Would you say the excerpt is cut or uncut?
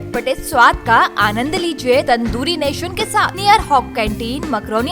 cut